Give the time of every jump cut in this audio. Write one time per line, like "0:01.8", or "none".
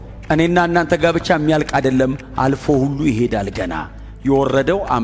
none